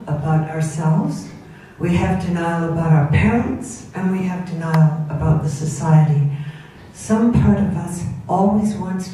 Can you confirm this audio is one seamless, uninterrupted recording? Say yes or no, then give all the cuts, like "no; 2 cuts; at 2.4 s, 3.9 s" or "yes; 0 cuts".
yes; 0 cuts